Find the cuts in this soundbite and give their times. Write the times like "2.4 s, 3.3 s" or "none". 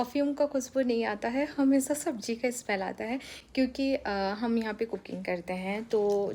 none